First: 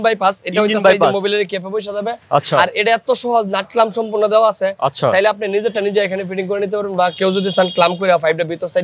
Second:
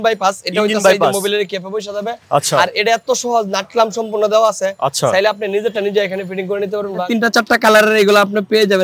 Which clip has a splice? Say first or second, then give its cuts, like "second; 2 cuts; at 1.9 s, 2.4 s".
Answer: second; 1 cut; at 7.0 s